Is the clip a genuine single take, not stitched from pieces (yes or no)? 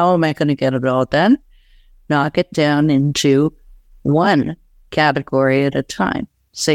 yes